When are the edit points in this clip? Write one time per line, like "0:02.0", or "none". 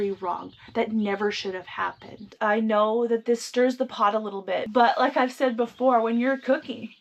0:02.2